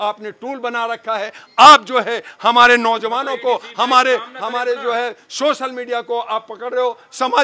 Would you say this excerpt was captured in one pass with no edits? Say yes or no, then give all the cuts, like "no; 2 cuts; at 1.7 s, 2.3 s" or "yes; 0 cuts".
yes; 0 cuts